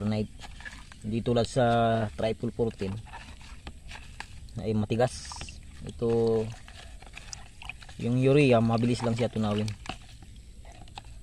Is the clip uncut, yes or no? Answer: yes